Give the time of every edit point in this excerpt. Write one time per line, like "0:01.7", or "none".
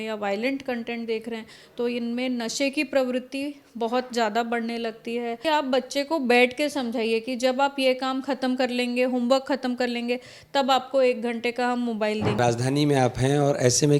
0:05.4
0:12.4